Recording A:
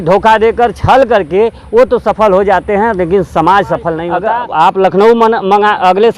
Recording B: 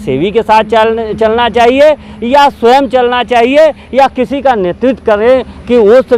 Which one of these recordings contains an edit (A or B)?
A